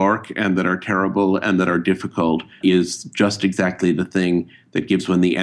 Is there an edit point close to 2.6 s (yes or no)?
yes